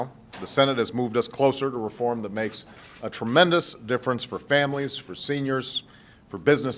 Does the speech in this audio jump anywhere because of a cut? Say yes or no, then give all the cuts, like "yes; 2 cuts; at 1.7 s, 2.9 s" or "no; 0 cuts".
yes; 1 cut; at 2.1 s